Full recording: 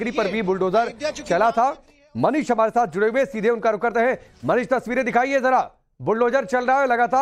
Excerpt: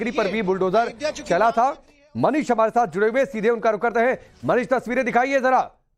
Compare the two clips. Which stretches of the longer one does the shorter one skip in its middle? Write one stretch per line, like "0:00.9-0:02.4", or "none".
none